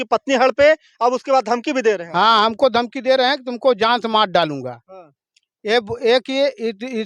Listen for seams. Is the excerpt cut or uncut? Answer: uncut